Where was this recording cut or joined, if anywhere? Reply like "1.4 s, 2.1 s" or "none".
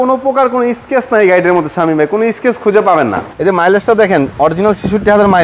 3.3 s